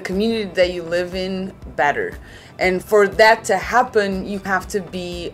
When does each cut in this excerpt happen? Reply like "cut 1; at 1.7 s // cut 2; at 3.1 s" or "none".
cut 1; at 4.4 s

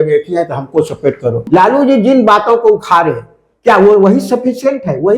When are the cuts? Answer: cut 1; at 1.4 s

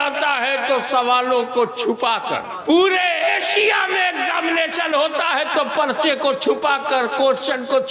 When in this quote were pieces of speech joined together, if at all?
cut 1; at 2.5 s

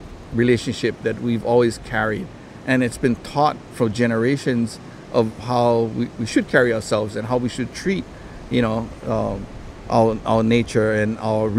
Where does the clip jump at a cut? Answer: none

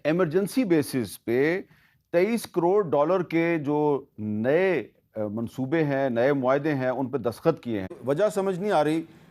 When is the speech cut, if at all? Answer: cut 1; at 8.0 s

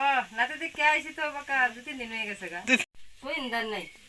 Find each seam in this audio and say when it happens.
cut 1; at 2.8 s

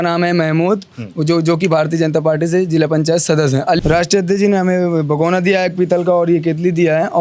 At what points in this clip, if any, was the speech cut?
cut 1; at 3.8 s

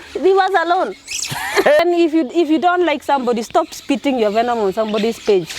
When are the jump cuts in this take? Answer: cut 1; at 1.8 s

